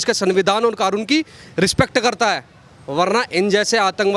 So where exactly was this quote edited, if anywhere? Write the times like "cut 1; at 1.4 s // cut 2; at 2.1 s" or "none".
none